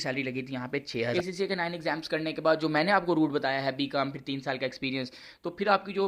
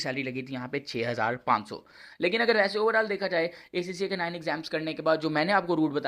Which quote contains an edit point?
first; 1 cut; at 1.1 s

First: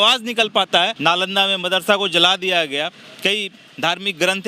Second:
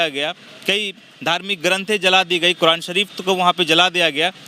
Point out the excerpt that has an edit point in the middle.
first; 1 cut; at 0.9 s

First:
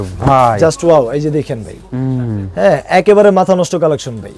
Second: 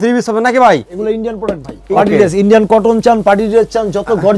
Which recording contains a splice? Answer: second; 1 cut; at 1.2 s

